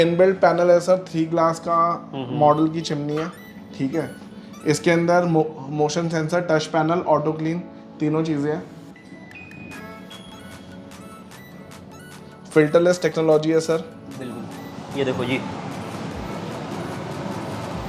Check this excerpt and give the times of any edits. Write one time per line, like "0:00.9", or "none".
none

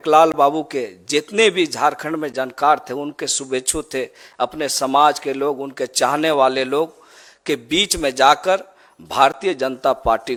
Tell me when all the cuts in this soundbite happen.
none

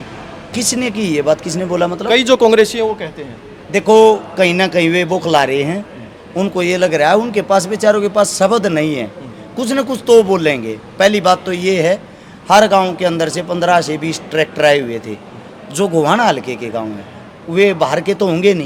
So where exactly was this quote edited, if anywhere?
none

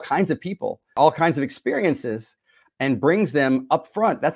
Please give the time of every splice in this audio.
0:00.9

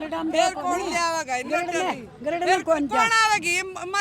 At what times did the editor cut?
none

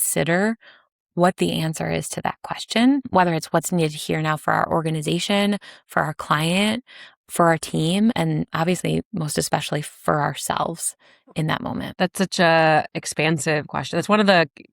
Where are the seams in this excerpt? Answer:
0:03.1
0:08.2
0:11.9

